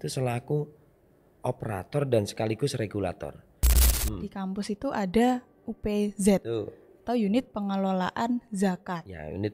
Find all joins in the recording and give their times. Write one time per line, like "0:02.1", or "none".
0:03.9